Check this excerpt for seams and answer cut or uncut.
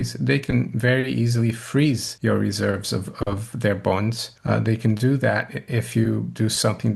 cut